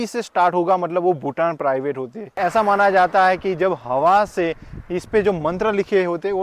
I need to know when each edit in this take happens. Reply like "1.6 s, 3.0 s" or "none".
2.4 s